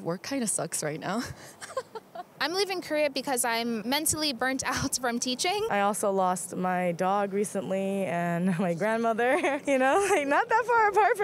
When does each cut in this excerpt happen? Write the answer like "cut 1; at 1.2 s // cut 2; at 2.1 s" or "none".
cut 1; at 2.2 s // cut 2; at 5.7 s // cut 3; at 9.6 s